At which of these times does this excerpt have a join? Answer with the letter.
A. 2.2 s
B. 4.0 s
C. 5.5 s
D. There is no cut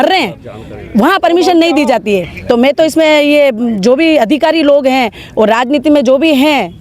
D